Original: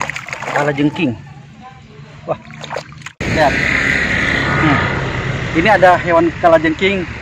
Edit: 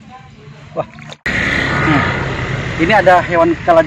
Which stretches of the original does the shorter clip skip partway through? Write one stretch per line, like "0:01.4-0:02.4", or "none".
0:02.7-0:04.0